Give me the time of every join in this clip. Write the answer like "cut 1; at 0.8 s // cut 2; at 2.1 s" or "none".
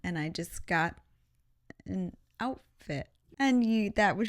cut 1; at 3.2 s